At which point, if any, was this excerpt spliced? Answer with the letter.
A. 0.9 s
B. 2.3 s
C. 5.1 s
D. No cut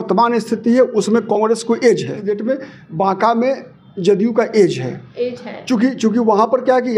B